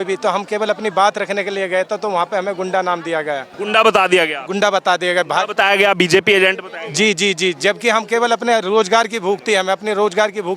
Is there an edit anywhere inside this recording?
yes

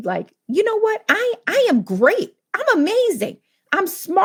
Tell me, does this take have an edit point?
no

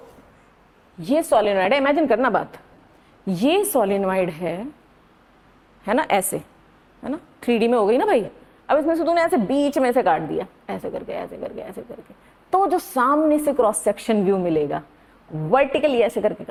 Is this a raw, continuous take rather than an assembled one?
yes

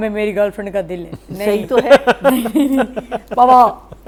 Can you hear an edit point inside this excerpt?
no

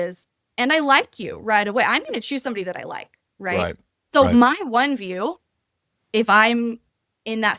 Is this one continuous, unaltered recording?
yes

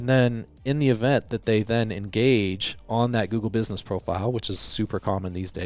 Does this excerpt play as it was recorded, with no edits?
yes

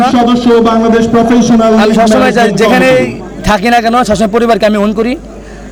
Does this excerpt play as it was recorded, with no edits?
yes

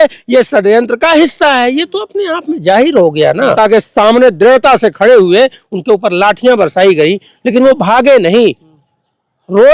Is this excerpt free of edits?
no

